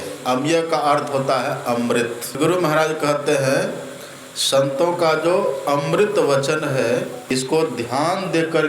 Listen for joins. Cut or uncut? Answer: cut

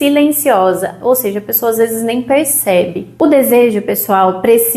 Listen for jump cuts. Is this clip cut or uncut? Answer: cut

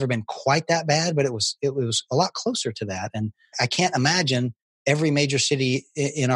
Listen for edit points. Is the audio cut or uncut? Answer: uncut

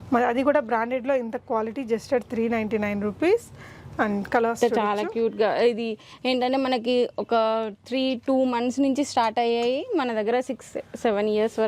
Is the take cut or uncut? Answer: uncut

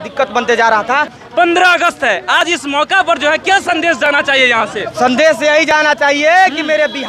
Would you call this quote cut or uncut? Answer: cut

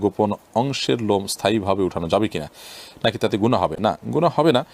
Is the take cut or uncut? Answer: uncut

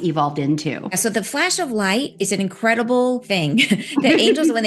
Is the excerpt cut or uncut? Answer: cut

